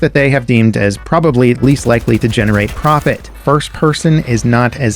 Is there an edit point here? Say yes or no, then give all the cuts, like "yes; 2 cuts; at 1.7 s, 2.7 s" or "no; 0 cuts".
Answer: yes; 1 cut; at 3.3 s